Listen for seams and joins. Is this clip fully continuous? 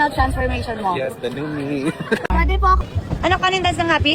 no; 1 cut; at 2.9 s

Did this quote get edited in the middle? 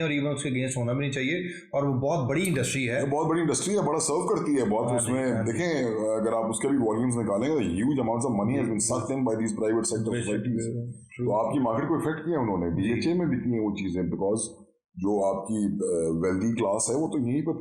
no; 0 cuts

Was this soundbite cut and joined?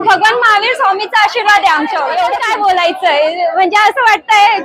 yes; 1 cut; at 2.3 s

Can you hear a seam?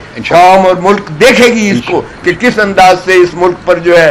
no; 0 cuts

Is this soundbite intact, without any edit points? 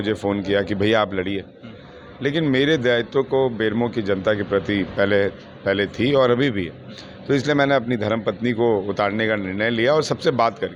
yes; 0 cuts

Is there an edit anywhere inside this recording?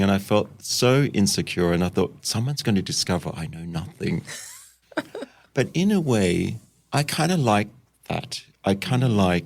no; 0 cuts

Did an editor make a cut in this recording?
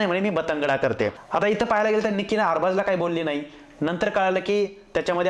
yes; 1 cut; at 1.2 s

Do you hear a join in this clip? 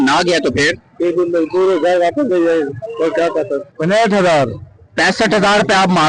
yes; 1 cut; at 3.7 s

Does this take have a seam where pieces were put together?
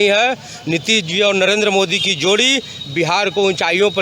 no; 0 cuts

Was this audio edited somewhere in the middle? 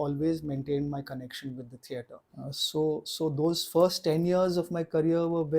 yes; 1 cut; at 2.2 s

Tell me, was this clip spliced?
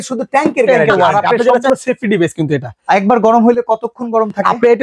yes; 1 cut; at 1.7 s

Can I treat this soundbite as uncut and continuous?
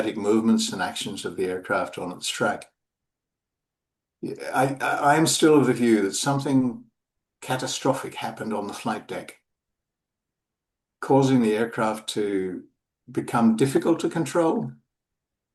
yes; 0 cuts

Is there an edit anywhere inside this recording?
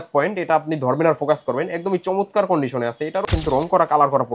yes; 1 cut; at 3.3 s

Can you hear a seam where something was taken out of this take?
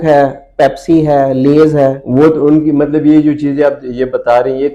no; 0 cuts

